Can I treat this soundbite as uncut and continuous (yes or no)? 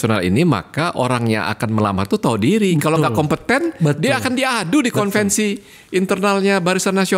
yes